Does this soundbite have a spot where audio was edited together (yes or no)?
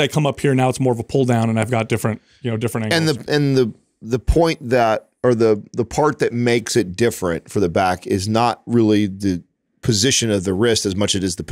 no